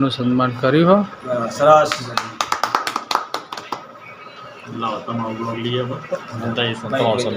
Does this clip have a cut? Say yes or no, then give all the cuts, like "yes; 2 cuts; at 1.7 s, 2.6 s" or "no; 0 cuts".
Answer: no; 0 cuts